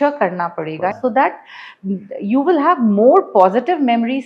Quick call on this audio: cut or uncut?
cut